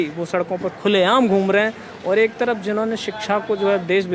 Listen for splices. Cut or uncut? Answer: uncut